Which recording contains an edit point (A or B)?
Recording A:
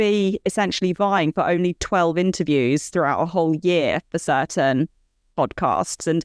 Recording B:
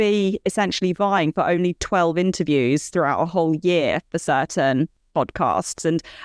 B